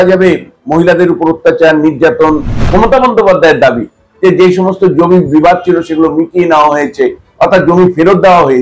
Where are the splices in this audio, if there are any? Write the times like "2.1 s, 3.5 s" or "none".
2.5 s